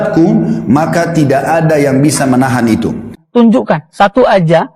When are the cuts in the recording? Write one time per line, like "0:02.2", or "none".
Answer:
0:03.2